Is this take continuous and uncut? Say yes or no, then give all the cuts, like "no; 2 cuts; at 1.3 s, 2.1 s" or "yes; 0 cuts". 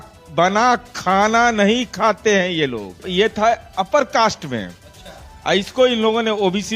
no; 1 cut; at 3.0 s